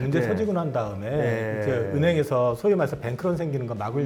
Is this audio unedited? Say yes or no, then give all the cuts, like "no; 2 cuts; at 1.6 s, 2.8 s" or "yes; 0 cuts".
yes; 0 cuts